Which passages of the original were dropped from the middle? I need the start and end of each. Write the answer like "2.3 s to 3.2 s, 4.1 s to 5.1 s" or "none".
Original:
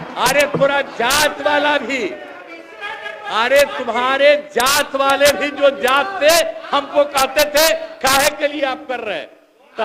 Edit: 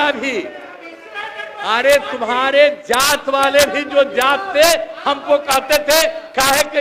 none